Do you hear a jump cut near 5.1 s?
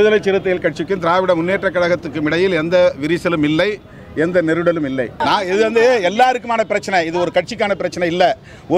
yes; 1 cut; at 5.1 s

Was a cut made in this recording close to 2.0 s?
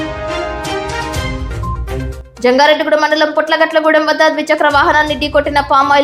yes; 1 cut; at 2.0 s

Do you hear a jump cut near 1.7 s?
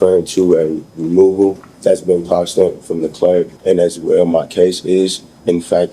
yes; 2 cuts; at 1.7 s, 3.5 s

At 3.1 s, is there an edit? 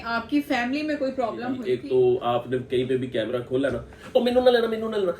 no; 1 cut; at 1.6 s

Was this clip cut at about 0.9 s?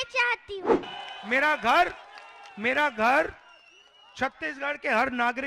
yes; 1 cut; at 0.9 s

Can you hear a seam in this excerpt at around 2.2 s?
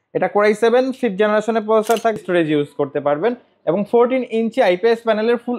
yes; 1 cut; at 2.2 s

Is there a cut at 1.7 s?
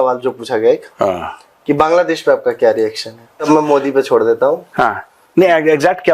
no; 1 cut; at 3.5 s

